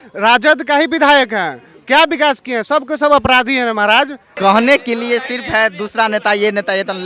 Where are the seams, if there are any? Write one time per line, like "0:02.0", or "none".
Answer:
0:04.2